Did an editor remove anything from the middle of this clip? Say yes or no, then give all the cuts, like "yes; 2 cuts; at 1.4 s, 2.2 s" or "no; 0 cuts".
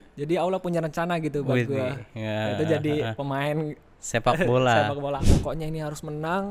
yes; 1 cut; at 5.3 s